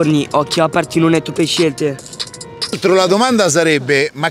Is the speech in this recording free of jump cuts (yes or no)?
no